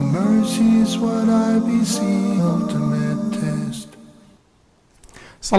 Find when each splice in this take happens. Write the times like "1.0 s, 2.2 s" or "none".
none